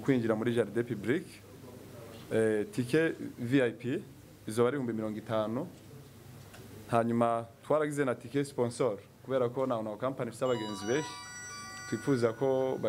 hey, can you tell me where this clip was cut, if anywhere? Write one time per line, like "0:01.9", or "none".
none